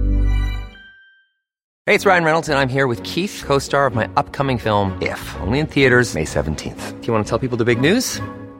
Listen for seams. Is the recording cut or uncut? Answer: cut